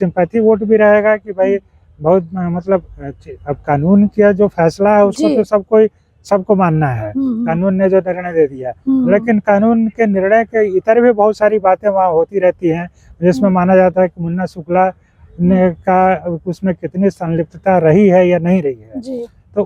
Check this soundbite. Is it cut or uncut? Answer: uncut